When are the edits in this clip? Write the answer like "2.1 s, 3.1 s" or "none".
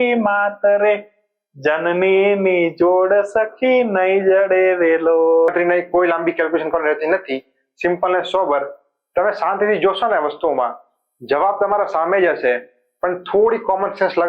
5.5 s